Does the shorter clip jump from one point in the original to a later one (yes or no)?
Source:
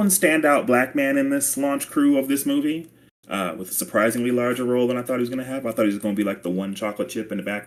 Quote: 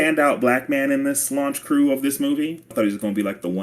yes